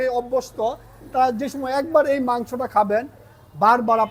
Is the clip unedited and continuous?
yes; 0 cuts

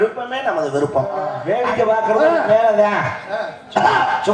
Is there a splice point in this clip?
yes; 1 cut; at 1.4 s

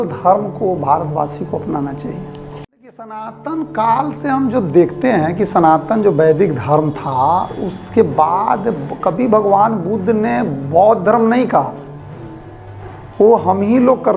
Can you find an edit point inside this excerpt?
yes; 1 cut; at 3.1 s

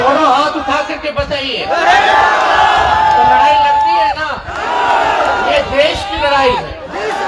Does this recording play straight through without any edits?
yes; 0 cuts

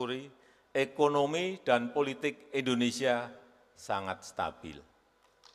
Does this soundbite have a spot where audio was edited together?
no; 0 cuts

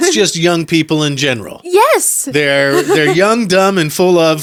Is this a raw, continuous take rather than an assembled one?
yes; 0 cuts

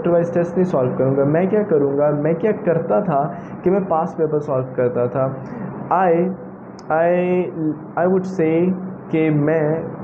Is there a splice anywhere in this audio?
no; 0 cuts

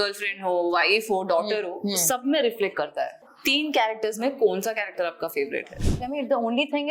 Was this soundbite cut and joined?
yes; 2 cuts; at 3.3 s, 6.0 s

